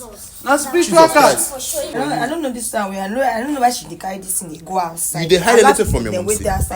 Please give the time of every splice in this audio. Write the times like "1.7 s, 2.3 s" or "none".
2.0 s